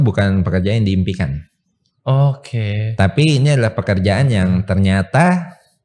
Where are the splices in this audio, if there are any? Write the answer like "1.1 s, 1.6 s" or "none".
none